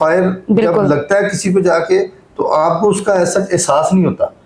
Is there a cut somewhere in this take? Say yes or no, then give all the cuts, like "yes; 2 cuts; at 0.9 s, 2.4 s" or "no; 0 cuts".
no; 0 cuts